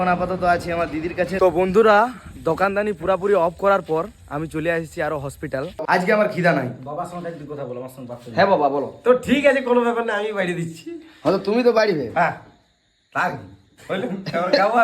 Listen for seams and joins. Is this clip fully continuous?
no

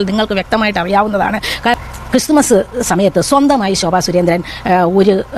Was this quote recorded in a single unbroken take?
no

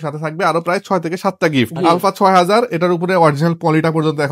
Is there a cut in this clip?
yes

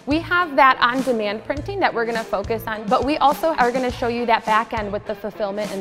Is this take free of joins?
no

